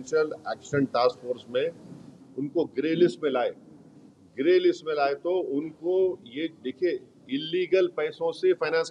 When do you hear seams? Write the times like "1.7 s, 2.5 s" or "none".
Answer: none